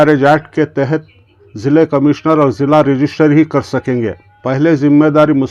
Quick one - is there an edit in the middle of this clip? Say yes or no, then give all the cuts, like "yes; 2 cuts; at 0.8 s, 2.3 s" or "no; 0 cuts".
no; 0 cuts